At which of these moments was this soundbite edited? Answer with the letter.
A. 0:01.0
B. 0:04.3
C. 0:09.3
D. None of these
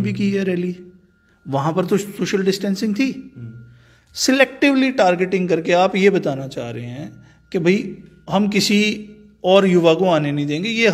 D